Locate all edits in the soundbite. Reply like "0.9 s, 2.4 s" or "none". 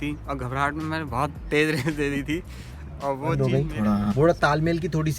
3.7 s

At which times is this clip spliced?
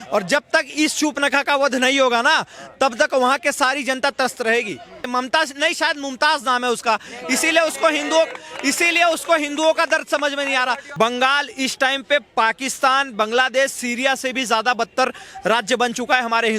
5.1 s, 10.8 s

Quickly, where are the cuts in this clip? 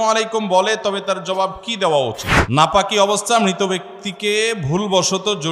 2.3 s

